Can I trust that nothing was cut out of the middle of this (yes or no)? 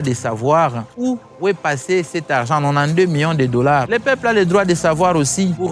no